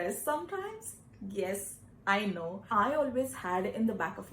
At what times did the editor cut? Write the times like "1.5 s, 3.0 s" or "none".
2.6 s